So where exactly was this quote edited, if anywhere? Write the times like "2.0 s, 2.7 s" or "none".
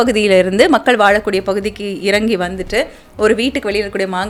none